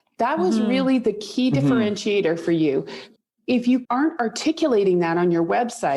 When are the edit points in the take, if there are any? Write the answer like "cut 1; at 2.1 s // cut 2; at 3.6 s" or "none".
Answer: cut 1; at 3.0 s // cut 2; at 3.9 s